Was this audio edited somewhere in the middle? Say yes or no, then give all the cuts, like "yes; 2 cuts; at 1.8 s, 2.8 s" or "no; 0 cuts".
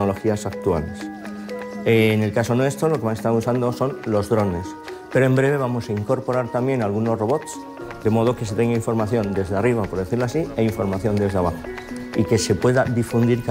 no; 0 cuts